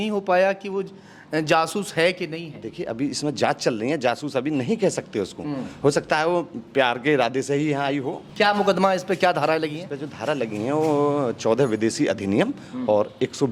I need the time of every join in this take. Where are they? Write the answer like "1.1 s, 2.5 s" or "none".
8.2 s